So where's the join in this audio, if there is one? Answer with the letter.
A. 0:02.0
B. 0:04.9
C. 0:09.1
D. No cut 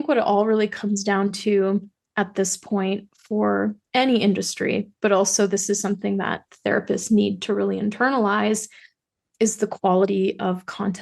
D